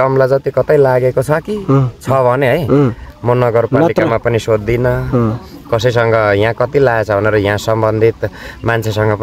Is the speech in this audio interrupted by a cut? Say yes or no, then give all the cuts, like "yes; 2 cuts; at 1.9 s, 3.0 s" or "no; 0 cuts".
no; 0 cuts